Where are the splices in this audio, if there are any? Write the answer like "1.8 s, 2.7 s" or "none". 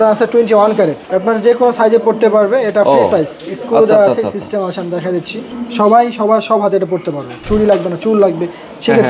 1.1 s, 5.4 s, 7.5 s